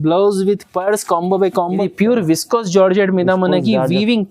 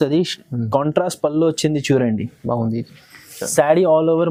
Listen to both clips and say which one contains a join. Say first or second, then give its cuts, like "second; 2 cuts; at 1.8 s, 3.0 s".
first; 1 cut; at 1.8 s